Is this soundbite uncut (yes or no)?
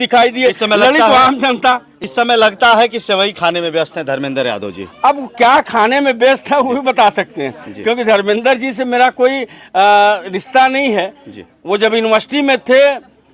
yes